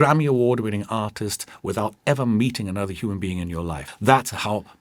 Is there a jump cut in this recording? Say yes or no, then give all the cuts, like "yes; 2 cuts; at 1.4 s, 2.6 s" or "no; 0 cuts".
yes; 1 cut; at 3.9 s